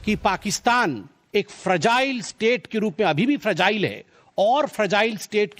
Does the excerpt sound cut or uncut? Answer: cut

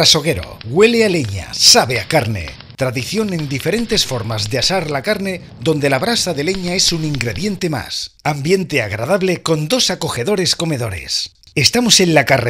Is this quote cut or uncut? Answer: uncut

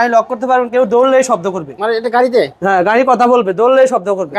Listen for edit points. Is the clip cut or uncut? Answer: uncut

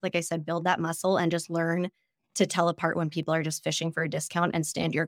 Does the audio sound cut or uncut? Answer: uncut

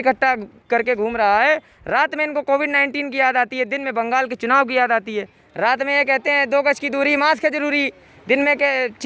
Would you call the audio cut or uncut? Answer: uncut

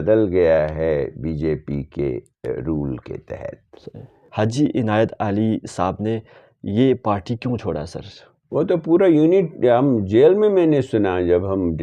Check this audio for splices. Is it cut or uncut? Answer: cut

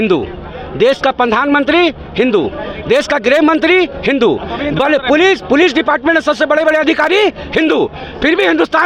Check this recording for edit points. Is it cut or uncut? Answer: uncut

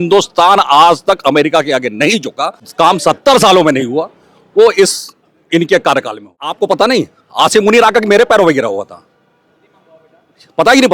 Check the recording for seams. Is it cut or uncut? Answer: cut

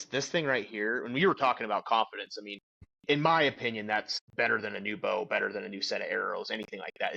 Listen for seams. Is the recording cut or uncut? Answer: cut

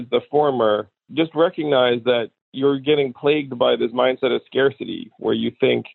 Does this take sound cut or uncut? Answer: cut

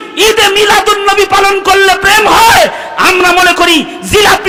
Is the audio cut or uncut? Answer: uncut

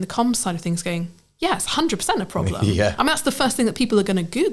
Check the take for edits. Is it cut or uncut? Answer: uncut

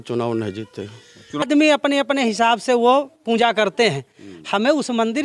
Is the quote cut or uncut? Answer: cut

